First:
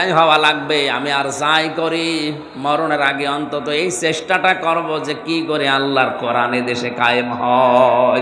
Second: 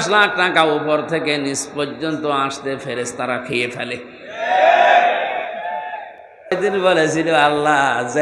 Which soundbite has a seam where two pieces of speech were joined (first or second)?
second